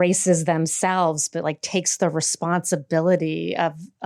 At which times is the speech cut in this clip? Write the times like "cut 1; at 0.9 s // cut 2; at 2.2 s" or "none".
none